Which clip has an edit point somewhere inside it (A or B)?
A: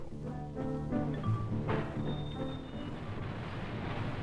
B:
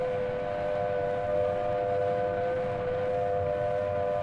B